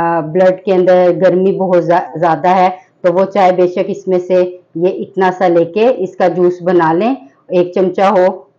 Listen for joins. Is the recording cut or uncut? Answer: uncut